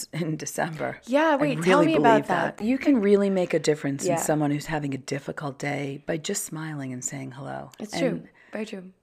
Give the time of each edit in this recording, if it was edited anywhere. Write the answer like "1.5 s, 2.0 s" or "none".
2.6 s